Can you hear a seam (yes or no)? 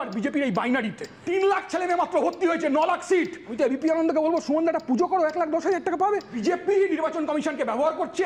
yes